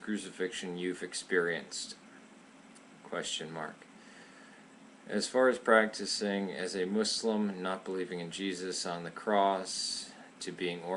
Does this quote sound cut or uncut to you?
cut